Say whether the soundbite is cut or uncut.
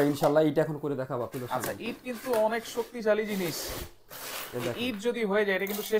uncut